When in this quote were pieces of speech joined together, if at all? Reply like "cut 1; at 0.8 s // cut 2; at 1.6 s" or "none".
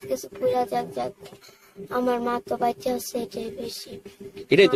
none